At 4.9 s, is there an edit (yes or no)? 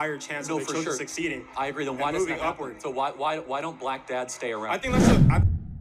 yes